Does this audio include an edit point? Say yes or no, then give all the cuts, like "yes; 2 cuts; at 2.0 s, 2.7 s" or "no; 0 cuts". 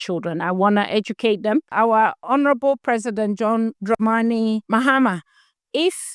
yes; 3 cuts; at 2.0 s, 3.8 s, 4.6 s